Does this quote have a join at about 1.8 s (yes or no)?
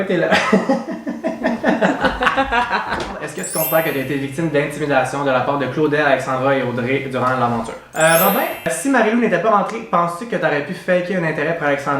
no